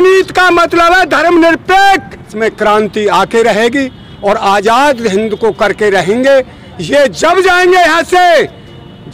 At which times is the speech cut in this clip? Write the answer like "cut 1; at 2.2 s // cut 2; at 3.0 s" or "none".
cut 1; at 2.3 s

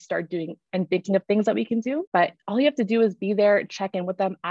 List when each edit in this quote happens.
cut 1; at 2.0 s

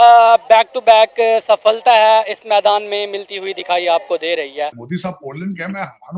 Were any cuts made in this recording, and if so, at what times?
cut 1; at 4.8 s

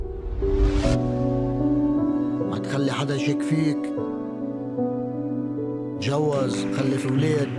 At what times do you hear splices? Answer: none

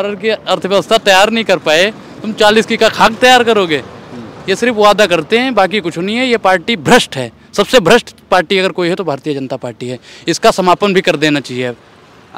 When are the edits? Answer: none

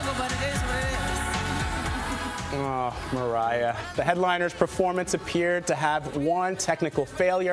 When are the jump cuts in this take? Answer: cut 1; at 1.2 s

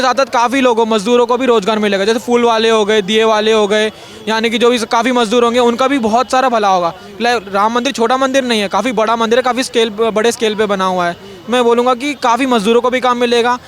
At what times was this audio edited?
none

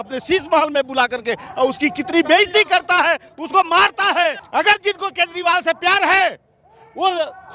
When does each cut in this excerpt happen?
cut 1; at 4.4 s

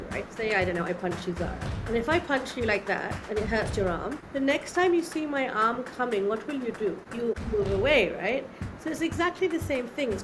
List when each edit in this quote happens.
none

